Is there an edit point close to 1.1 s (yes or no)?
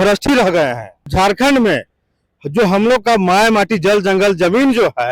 yes